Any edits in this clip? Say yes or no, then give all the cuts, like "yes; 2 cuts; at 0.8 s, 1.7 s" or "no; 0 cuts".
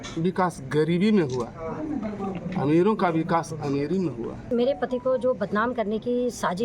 yes; 1 cut; at 4.5 s